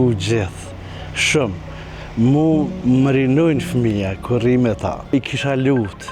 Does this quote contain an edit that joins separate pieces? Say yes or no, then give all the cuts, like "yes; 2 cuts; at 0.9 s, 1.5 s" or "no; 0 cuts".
yes; 1 cut; at 5.1 s